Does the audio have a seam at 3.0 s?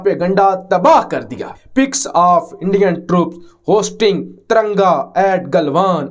no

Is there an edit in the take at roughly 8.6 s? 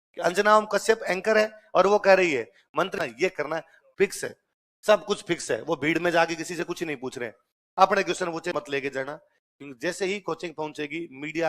yes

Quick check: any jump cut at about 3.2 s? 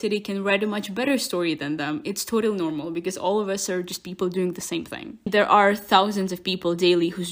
no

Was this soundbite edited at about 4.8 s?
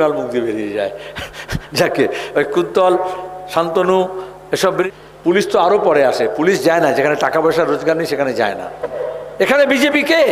yes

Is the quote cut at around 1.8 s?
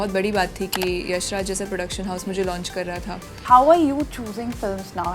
no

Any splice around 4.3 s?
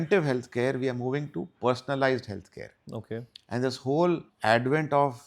yes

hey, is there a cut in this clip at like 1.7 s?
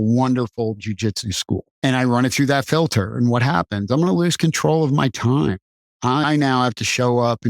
yes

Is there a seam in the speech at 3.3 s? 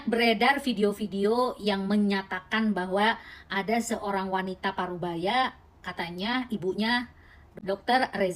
no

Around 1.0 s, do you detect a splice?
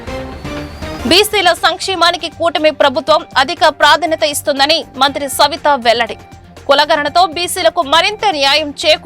yes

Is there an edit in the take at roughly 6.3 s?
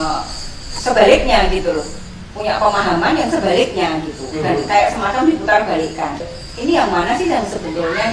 yes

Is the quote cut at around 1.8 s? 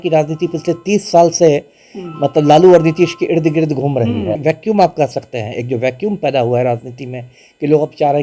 no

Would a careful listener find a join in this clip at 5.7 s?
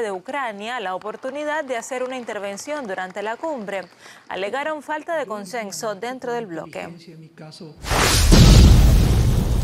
no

